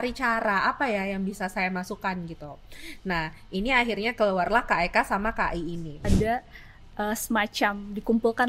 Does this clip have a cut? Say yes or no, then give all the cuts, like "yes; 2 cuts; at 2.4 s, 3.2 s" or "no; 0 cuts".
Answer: yes; 1 cut; at 6.0 s